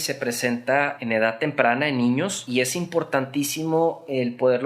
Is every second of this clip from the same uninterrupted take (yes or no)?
no